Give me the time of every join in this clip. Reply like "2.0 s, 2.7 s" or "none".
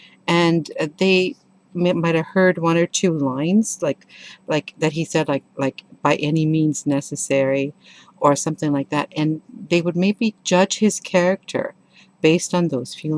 none

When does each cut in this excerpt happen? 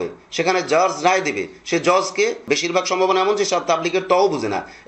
2.5 s

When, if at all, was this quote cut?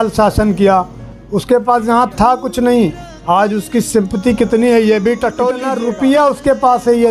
5.7 s

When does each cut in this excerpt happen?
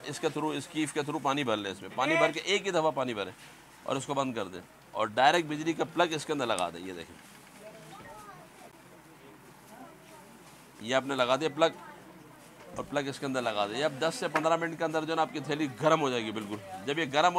none

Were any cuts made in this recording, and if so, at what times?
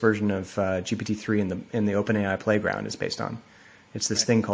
none

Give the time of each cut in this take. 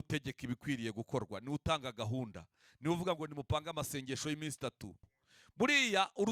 5.1 s

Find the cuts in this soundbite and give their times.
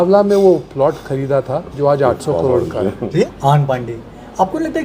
3.3 s

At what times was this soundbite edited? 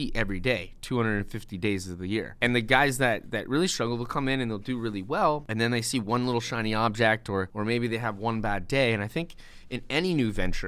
2.3 s, 5.5 s, 7.5 s

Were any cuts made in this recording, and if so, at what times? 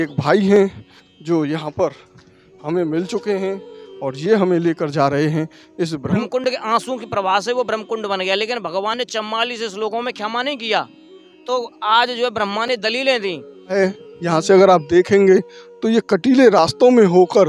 6.2 s, 13.8 s

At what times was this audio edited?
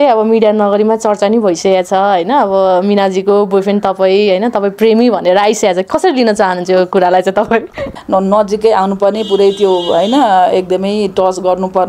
7.9 s

